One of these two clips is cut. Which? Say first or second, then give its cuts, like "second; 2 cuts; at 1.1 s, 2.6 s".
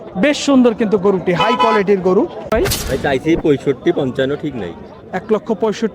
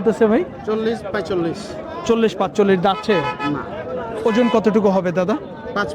first; 1 cut; at 2.5 s